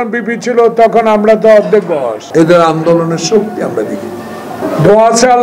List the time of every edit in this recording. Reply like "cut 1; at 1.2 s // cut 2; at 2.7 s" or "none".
cut 1; at 2.2 s // cut 2; at 4.6 s